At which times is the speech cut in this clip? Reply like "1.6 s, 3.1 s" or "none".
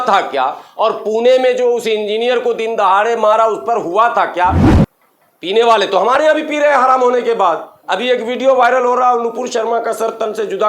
4.6 s